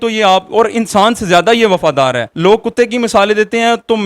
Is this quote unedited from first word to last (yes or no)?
no